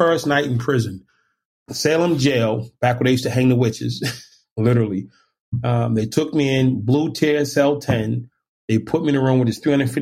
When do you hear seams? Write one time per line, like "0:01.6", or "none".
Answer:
0:01.4